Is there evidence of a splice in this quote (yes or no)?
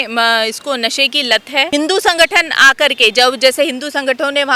yes